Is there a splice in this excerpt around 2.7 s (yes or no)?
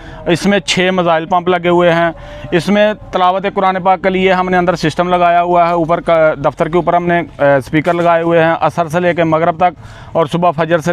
no